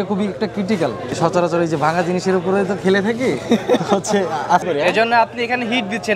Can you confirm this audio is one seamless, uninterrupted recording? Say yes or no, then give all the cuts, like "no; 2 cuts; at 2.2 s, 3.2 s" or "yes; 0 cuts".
no; 2 cuts; at 1.2 s, 4.6 s